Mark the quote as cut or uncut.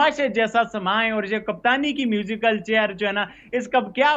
uncut